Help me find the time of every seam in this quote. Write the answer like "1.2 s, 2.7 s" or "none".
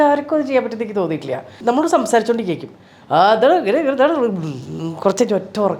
1.6 s